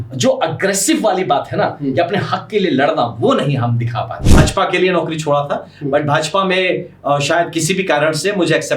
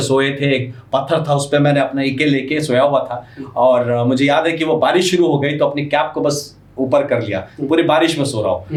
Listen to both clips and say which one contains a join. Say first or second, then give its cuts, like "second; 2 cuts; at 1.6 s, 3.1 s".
first; 1 cut; at 4.2 s